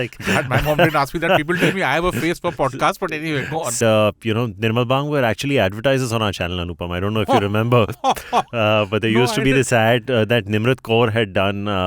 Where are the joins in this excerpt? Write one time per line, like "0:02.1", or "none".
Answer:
0:03.8